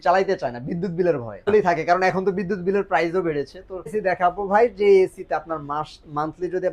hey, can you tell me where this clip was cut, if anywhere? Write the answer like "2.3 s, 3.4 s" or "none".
1.4 s, 3.9 s